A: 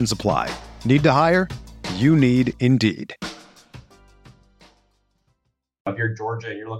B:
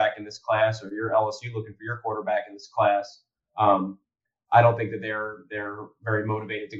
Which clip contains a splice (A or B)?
A